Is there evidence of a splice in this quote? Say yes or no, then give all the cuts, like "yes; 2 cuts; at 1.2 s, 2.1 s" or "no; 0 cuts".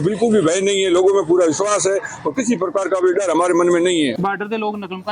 yes; 1 cut; at 4.1 s